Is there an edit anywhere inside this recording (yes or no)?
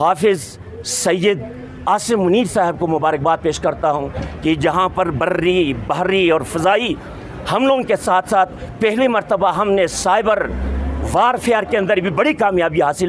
no